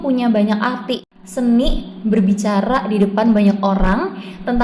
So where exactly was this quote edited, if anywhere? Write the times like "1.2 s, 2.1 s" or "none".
1.0 s